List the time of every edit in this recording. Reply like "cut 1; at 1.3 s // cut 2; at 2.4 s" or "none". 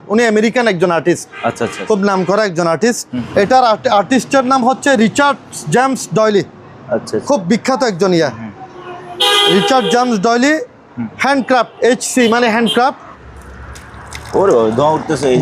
cut 1; at 3.1 s // cut 2; at 13.1 s